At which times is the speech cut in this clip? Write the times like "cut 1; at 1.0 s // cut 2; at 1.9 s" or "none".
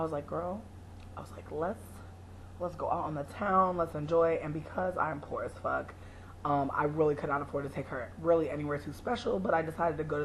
cut 1; at 3.3 s